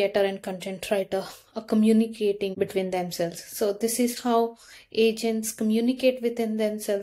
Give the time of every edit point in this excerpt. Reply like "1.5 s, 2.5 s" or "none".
2.5 s